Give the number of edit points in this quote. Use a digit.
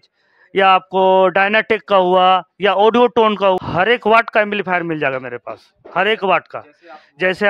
1